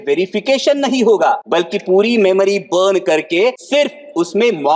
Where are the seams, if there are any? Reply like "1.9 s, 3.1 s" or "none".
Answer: 1.4 s, 3.6 s